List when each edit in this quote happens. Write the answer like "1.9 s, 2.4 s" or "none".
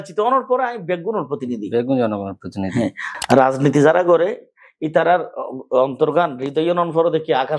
3.1 s